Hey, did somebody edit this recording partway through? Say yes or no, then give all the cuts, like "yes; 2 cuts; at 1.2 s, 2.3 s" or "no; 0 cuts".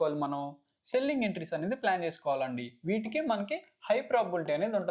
no; 0 cuts